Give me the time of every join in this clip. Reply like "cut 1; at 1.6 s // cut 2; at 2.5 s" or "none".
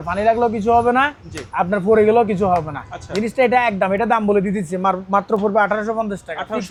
none